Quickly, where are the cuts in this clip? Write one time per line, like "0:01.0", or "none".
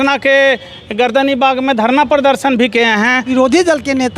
0:03.3